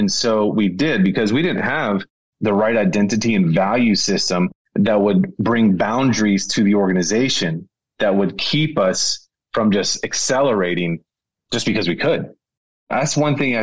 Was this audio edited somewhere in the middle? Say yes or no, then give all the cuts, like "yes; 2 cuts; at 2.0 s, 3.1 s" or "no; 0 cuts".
yes; 2 cuts; at 2.2 s, 12.6 s